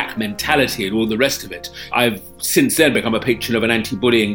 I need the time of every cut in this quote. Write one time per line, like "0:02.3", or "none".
0:01.9